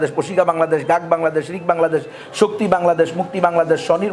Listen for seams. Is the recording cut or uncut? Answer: uncut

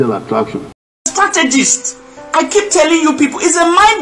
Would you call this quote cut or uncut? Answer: cut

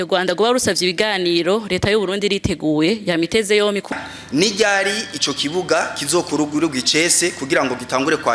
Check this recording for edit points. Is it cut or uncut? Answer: cut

